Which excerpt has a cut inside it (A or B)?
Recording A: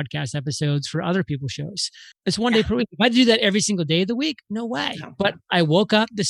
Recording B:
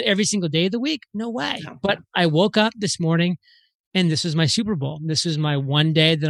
A